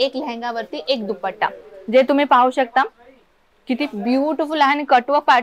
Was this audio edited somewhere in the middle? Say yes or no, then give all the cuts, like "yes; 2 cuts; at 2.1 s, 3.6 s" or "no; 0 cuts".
no; 0 cuts